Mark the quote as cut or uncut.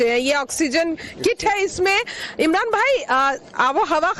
uncut